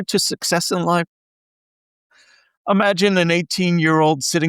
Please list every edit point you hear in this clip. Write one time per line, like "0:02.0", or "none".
none